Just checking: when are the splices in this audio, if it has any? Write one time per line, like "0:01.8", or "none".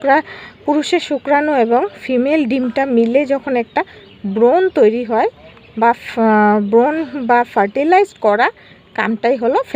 none

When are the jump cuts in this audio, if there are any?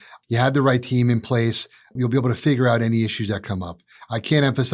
0:01.9

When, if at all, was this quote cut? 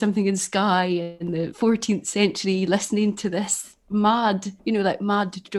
0:01.3
0:04.5

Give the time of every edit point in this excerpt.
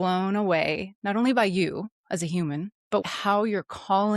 0:03.1

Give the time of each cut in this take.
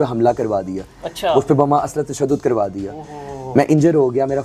none

